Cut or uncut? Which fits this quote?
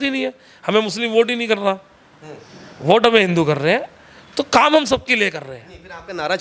uncut